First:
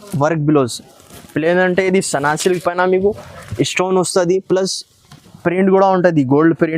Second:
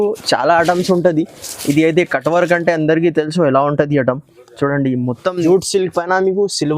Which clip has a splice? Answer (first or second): second